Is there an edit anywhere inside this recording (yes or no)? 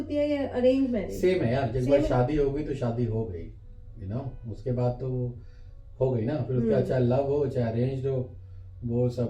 no